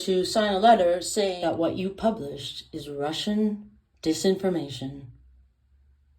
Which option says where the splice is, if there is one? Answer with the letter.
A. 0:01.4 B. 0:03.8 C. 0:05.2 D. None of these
A